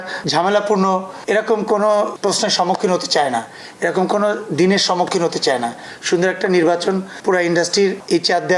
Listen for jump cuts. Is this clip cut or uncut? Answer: uncut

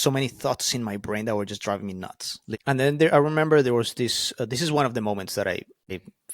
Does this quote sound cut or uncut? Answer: cut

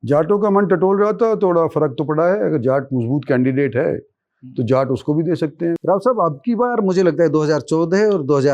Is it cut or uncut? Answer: cut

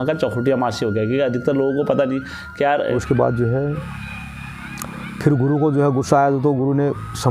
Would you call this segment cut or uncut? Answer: cut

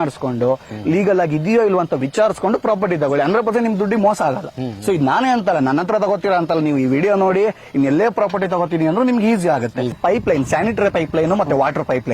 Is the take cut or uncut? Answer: cut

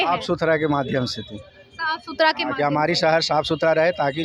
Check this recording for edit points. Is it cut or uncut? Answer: uncut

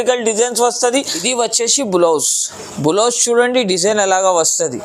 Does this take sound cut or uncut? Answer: cut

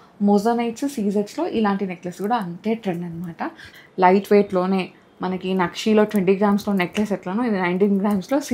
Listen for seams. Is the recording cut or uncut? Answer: cut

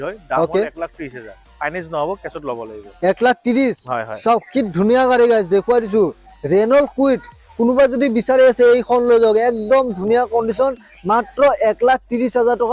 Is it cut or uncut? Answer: uncut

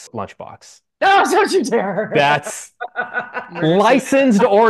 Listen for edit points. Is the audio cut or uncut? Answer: uncut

